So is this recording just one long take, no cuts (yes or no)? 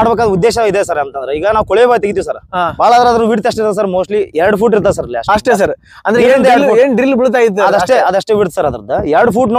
yes